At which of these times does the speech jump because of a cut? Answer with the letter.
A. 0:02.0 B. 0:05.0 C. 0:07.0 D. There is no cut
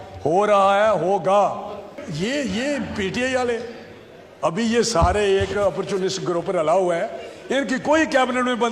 A